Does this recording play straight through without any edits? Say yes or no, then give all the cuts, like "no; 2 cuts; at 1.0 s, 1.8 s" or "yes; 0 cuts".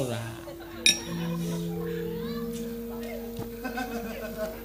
yes; 0 cuts